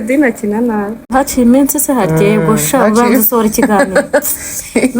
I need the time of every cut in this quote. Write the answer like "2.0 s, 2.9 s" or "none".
1.0 s